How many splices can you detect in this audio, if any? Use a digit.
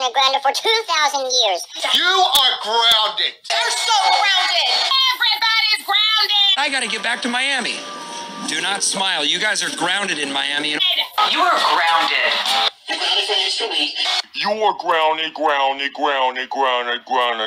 2